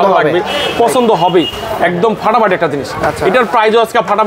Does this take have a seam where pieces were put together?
no; 0 cuts

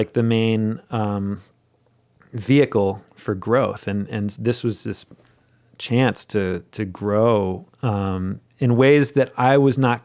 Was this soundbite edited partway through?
no; 0 cuts

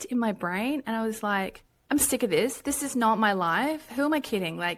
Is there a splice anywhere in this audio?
no; 0 cuts

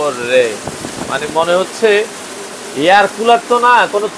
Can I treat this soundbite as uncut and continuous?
yes; 0 cuts

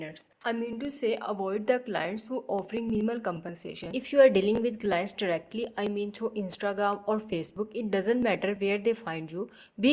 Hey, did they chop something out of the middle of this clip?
yes; 1 cut; at 4.0 s

